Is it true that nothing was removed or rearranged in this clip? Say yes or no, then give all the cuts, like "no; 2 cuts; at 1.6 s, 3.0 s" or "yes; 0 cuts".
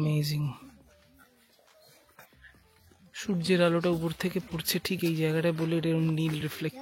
yes; 0 cuts